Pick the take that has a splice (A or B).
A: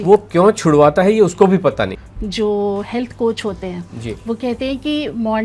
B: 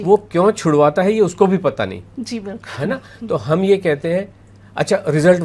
A